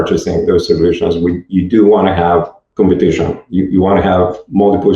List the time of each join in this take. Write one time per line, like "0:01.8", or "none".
0:02.6